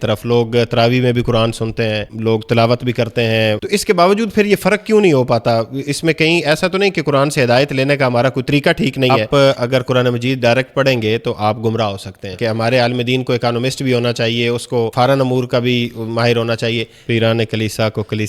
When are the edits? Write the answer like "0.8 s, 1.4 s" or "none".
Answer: 2.1 s, 3.6 s, 9.2 s, 12.3 s, 14.9 s, 16.9 s